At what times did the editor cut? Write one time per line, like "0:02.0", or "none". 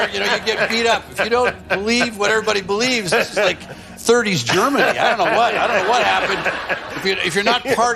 none